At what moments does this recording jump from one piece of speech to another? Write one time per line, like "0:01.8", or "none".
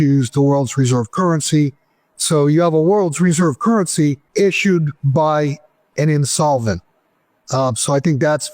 0:04.2